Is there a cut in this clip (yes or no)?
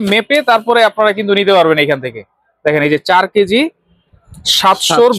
no